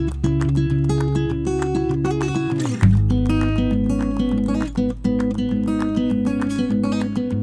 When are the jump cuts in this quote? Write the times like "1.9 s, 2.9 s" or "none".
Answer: none

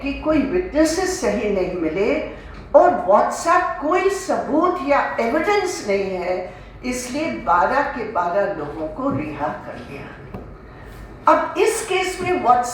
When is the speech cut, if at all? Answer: none

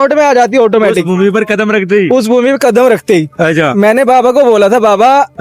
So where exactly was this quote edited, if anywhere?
none

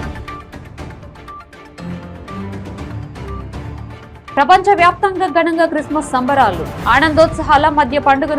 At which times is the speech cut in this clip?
3.5 s

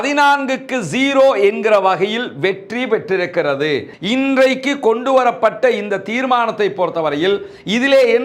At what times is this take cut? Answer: 4.0 s

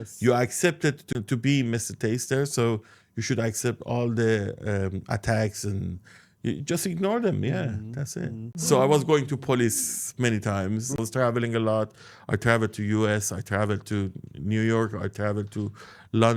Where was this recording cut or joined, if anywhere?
1.0 s, 8.5 s, 11.0 s

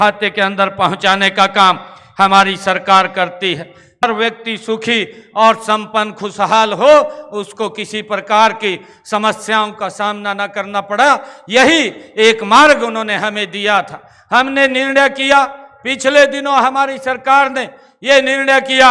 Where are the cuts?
4.0 s

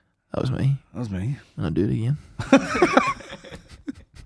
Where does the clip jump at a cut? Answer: none

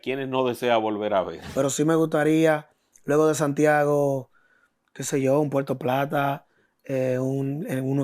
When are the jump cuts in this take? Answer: 1.4 s

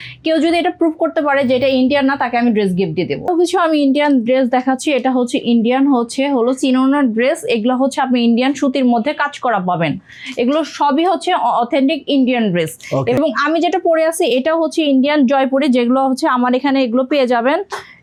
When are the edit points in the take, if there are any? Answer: none

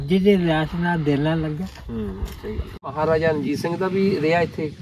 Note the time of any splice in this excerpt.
2.8 s

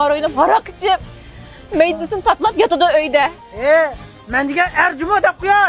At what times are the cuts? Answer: 3.4 s

